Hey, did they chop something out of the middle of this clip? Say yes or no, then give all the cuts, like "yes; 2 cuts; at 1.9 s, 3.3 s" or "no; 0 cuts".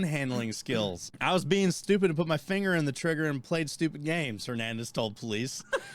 yes; 1 cut; at 1.6 s